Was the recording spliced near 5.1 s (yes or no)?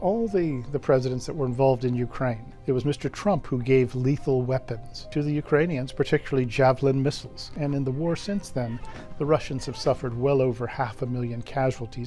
yes